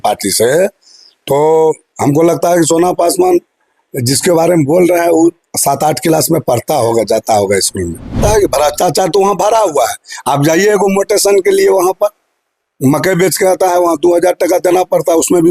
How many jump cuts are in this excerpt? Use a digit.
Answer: 1